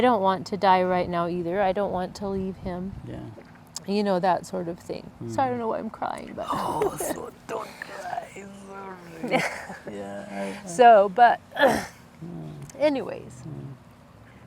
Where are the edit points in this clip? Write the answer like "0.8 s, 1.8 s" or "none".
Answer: none